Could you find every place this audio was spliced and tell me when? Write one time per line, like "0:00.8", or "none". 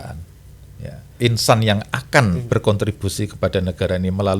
0:01.1